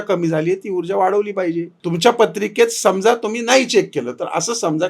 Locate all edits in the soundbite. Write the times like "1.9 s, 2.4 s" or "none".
1.7 s